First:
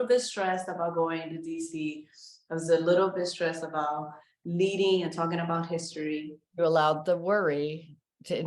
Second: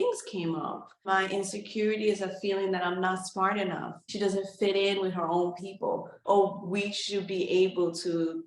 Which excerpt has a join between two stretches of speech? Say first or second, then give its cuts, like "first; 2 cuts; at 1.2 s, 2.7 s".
second; 3 cuts; at 1.1 s, 4.0 s, 6.1 s